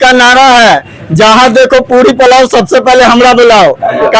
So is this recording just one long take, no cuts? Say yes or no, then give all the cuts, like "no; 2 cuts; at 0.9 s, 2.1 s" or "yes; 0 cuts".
yes; 0 cuts